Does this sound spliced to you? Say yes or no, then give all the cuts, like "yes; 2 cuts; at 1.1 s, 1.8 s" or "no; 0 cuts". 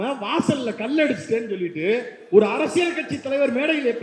no; 0 cuts